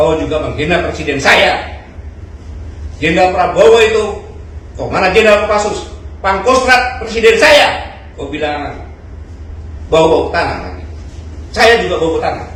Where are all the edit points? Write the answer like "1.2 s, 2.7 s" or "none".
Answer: none